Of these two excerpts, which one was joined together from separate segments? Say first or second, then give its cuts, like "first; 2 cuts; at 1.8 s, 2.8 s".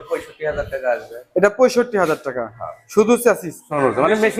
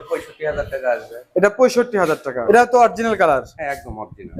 second; 1 cut; at 2.3 s